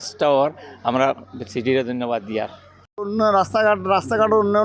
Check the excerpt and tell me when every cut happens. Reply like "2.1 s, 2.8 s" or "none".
3.0 s